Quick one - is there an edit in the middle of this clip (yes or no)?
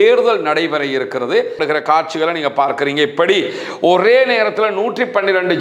yes